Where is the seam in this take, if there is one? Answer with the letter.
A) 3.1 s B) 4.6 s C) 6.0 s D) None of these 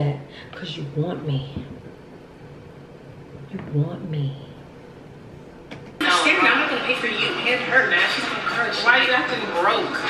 C